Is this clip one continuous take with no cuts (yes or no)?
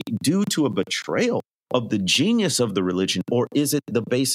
no